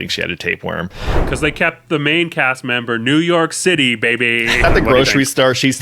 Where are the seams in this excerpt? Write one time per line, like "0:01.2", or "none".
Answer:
0:01.1
0:04.6